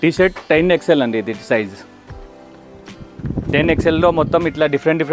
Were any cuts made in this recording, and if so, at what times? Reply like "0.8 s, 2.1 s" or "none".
none